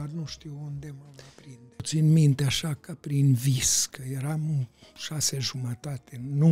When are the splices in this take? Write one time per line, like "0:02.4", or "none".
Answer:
0:01.8